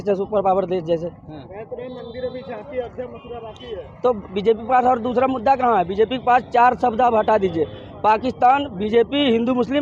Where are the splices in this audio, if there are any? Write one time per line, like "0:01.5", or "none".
none